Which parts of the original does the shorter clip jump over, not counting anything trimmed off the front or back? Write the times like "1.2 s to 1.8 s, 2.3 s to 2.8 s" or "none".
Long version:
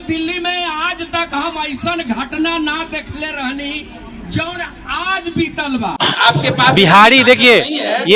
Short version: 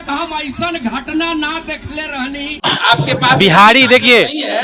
3.8 s to 6.0 s